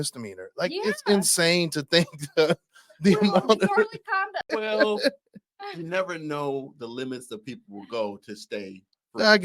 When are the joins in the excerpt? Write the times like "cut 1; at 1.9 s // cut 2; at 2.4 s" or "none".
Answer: cut 1; at 4.4 s